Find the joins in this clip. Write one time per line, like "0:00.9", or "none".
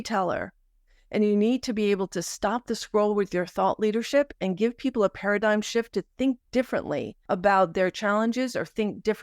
0:07.1